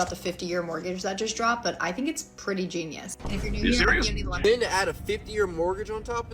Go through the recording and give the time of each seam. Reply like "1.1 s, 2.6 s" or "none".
4.2 s